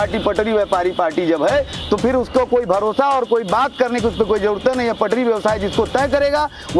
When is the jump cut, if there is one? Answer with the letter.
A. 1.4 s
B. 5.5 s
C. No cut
C